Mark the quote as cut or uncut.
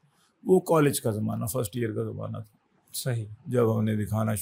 uncut